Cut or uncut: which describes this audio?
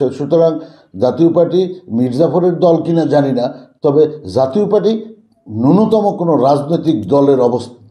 uncut